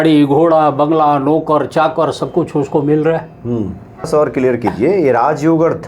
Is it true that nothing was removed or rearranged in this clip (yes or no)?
yes